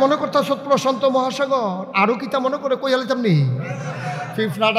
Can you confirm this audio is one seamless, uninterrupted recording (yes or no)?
yes